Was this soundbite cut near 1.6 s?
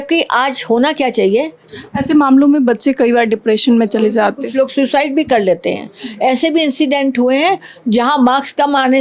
yes; 1 cut; at 1.6 s

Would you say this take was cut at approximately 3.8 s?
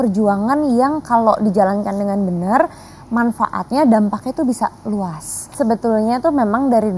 no; 1 cut; at 5.5 s

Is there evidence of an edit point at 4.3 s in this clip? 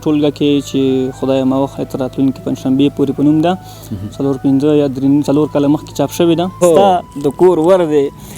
no; 1 cut; at 6.6 s

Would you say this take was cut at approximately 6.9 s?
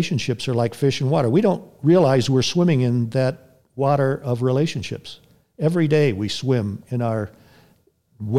no; 0 cuts

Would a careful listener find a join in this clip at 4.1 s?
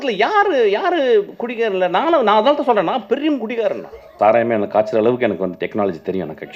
yes; 1 cut; at 4.1 s

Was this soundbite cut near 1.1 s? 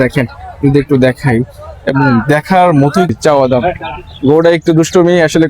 no; 1 cut; at 3.1 s

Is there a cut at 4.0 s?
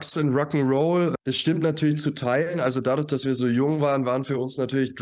no; 1 cut; at 1.1 s

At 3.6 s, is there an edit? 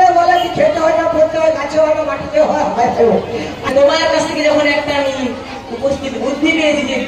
yes; 1 cut; at 3.6 s

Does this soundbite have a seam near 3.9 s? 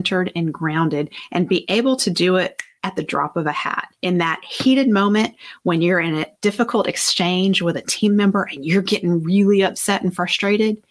yes; 3 cuts; at 1.2 s, 2.7 s, 3.9 s

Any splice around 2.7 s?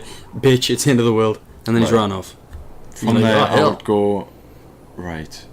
no; 1 cut; at 4.4 s

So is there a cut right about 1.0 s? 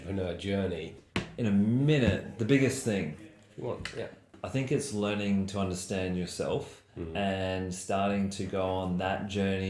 yes; 2 cuts; at 1.0 s, 4.4 s

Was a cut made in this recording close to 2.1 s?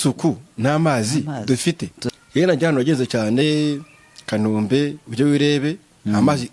yes; 1 cut; at 2.1 s

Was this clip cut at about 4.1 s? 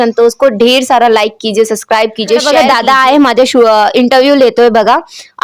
no; 1 cut; at 2.5 s

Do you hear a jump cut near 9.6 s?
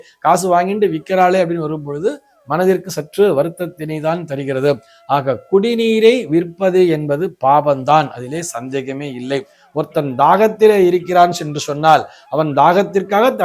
yes; 1 cut; at 9.6 s

